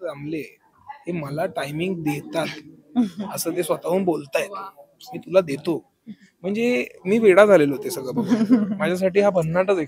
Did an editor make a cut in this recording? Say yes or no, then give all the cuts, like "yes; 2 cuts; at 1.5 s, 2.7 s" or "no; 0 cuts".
no; 0 cuts